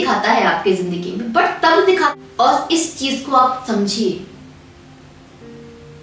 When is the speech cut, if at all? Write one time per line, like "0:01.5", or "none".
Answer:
0:02.1

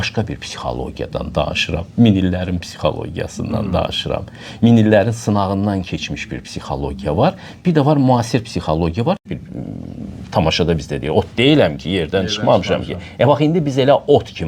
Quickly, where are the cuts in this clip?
0:09.2

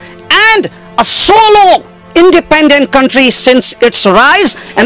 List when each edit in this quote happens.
none

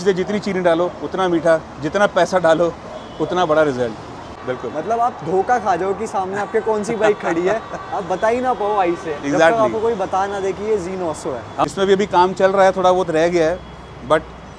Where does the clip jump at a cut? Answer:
0:04.4
0:11.7

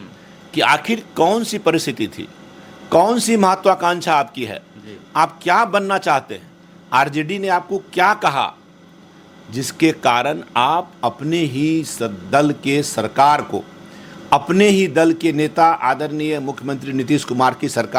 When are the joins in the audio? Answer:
none

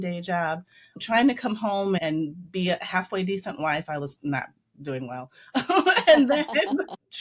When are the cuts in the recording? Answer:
0:01.0
0:02.0

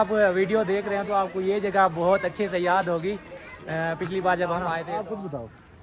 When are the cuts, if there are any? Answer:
0:04.9

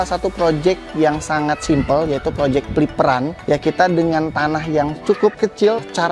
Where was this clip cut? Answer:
0:01.4

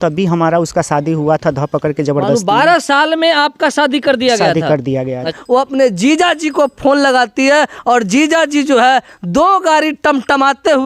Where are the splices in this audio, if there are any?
0:05.3

